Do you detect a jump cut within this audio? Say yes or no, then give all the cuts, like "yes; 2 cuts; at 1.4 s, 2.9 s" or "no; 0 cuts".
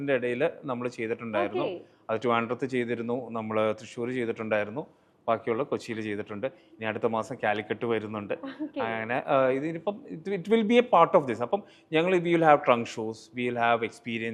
no; 0 cuts